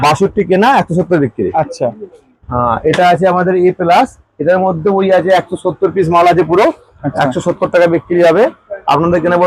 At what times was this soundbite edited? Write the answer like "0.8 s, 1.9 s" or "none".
none